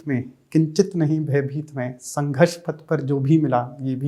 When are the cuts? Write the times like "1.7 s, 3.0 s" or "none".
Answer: none